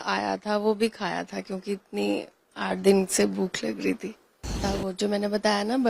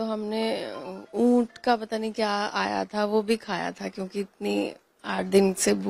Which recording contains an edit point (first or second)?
first